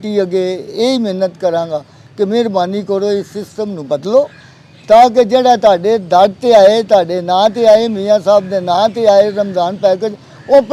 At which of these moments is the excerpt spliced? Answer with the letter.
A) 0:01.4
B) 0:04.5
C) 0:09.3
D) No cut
D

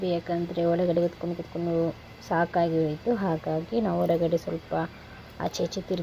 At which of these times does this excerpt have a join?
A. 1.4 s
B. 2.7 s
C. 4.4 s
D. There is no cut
D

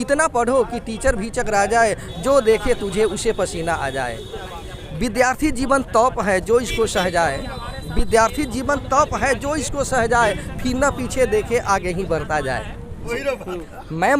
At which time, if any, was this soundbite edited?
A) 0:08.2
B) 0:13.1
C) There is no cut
B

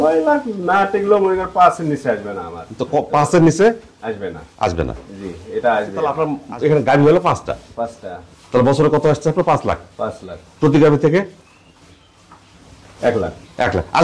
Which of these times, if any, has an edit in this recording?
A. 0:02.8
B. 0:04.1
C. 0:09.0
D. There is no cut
D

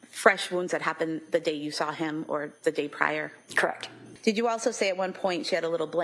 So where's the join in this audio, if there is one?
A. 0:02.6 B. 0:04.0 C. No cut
B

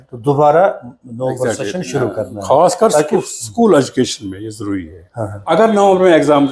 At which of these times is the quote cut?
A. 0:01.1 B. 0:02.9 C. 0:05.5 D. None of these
C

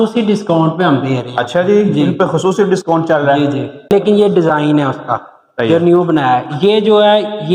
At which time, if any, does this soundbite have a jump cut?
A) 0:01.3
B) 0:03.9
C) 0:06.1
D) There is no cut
B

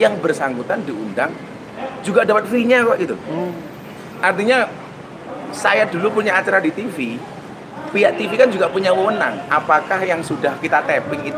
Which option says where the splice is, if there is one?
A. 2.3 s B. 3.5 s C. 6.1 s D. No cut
D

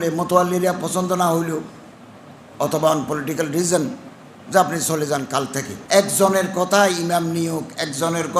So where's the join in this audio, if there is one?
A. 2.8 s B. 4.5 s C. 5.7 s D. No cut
C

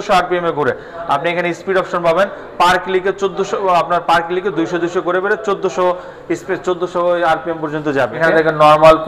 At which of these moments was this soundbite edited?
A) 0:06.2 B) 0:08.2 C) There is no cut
B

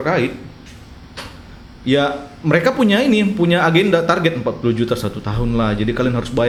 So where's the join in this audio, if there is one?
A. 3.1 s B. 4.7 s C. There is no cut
C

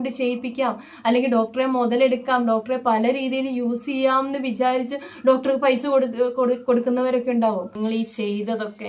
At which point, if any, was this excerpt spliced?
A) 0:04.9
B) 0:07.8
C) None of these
B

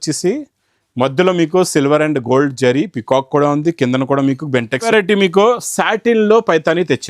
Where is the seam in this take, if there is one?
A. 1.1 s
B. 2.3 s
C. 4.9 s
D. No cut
C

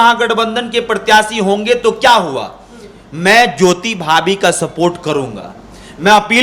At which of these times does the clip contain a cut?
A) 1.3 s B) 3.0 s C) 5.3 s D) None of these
D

